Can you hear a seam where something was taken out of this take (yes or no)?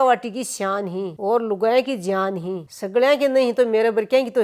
no